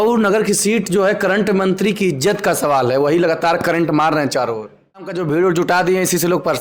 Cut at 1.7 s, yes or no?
no